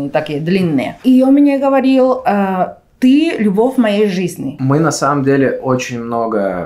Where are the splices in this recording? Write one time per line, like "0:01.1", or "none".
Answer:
0:01.0
0:04.5